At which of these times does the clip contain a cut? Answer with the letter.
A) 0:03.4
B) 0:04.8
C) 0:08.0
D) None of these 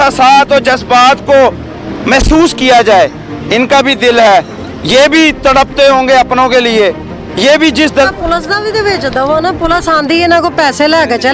C